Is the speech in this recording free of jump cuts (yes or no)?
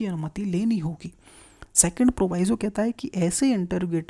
yes